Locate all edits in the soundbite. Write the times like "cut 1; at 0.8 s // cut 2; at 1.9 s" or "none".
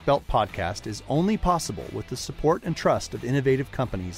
none